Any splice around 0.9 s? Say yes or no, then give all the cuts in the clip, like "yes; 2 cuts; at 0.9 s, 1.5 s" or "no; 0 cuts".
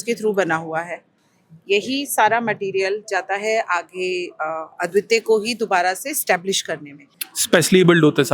no; 0 cuts